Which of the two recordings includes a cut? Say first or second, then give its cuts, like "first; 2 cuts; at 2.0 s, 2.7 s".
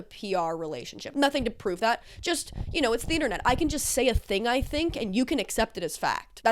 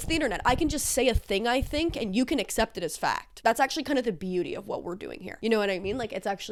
first; 1 cut; at 1.1 s